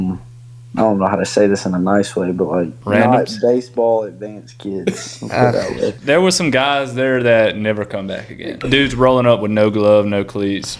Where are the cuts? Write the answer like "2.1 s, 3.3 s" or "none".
2.8 s, 6.0 s, 8.6 s